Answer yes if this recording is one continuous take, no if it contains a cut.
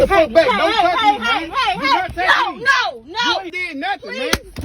no